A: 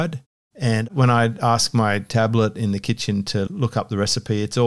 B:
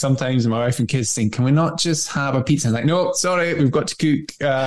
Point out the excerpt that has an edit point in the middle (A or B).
A